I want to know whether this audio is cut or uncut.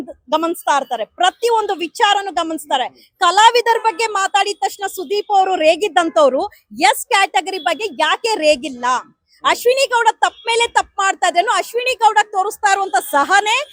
uncut